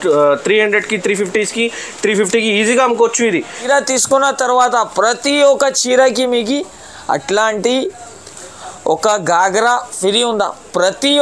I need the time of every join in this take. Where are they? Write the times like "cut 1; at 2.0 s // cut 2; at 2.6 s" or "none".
cut 1; at 3.6 s